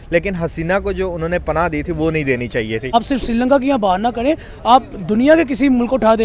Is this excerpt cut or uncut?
cut